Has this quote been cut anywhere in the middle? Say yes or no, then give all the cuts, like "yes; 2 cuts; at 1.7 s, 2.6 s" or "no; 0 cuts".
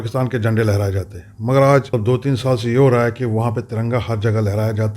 yes; 1 cut; at 1.9 s